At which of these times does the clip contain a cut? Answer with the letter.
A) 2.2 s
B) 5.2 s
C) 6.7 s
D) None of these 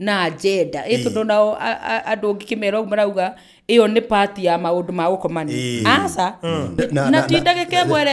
C